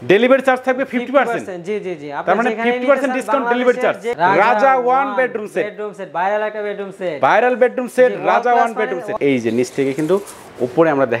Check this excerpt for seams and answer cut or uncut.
cut